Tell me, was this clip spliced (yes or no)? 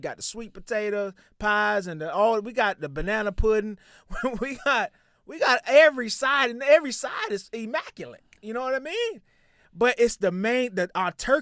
no